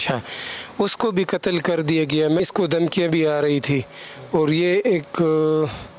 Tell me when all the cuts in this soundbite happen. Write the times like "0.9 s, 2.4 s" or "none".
2.4 s